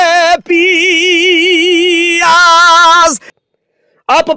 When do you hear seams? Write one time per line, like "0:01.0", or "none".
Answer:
0:03.3

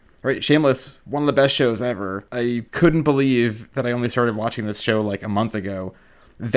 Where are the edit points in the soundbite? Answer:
0:01.0
0:02.6
0:03.6

